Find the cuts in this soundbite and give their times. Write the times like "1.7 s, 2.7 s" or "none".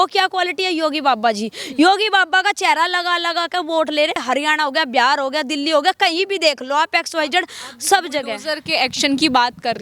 none